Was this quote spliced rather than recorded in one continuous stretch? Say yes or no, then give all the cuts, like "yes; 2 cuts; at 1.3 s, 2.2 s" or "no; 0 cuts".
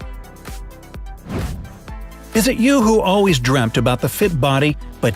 no; 0 cuts